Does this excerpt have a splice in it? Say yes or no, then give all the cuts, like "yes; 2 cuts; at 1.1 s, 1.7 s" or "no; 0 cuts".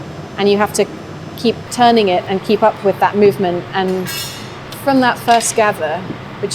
yes; 1 cut; at 4.2 s